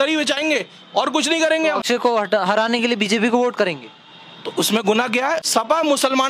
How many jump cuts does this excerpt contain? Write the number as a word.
two